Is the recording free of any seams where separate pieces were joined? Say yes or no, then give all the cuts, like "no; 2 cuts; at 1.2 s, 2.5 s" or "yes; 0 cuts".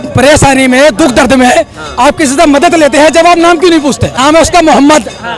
no; 1 cut; at 4.1 s